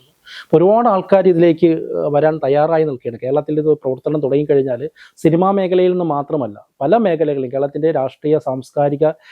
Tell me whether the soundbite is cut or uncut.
uncut